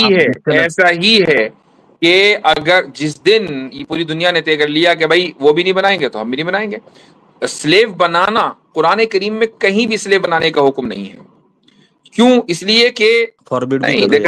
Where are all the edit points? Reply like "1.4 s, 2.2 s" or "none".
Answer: 13.4 s